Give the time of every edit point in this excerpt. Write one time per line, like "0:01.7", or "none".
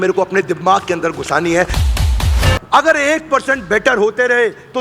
0:02.1